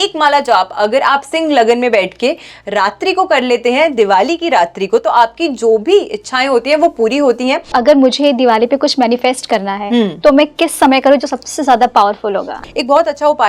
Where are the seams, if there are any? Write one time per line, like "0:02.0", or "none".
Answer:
0:07.7
0:12.6